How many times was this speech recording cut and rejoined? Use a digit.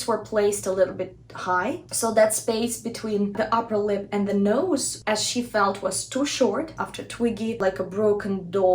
2